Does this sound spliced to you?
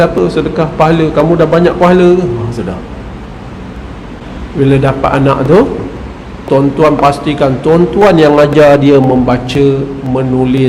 yes; 1 cut; at 4.2 s

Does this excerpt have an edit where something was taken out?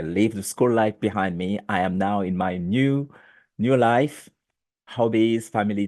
no; 0 cuts

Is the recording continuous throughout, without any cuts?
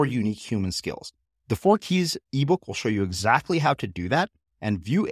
yes; 0 cuts

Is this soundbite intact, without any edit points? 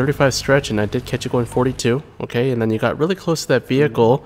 yes; 0 cuts

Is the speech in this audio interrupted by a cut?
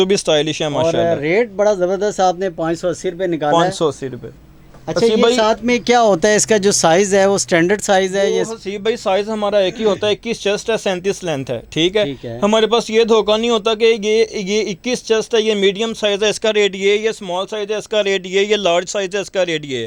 no; 0 cuts

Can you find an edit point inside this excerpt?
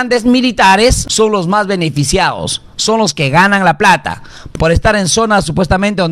yes; 2 cuts; at 1.0 s, 4.4 s

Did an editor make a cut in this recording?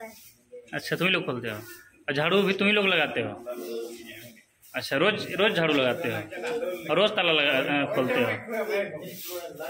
no; 0 cuts

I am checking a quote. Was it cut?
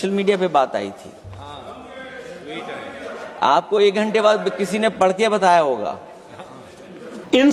no; 0 cuts

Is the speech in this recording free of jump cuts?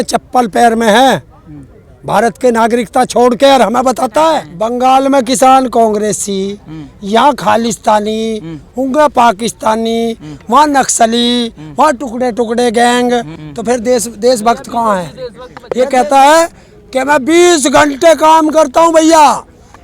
no; 3 cuts; at 4.5 s, 13.4 s, 15.6 s

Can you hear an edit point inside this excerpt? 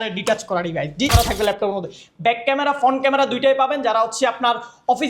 yes; 1 cut; at 1.1 s

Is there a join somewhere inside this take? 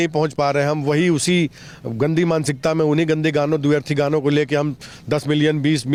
no; 0 cuts

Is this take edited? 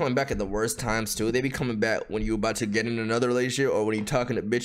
no; 0 cuts

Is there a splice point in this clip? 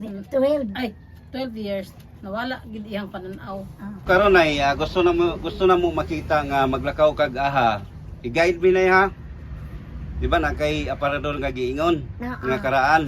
yes; 1 cut; at 4.0 s

